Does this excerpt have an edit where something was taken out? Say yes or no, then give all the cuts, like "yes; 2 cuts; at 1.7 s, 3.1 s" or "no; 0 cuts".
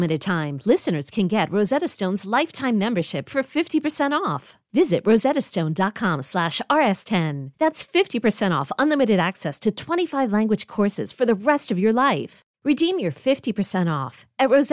no; 0 cuts